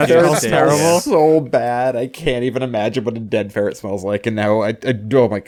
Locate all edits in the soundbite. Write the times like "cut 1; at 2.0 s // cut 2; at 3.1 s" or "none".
none